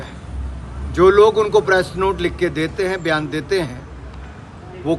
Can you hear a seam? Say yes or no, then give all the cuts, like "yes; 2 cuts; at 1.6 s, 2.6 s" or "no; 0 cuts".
no; 0 cuts